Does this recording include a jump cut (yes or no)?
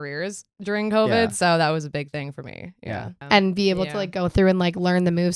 yes